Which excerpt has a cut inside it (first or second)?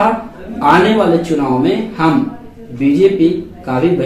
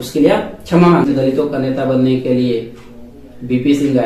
second